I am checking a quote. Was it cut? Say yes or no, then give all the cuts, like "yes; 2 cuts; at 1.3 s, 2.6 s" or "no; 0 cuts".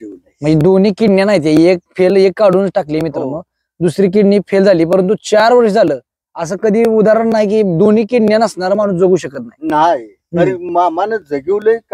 no; 0 cuts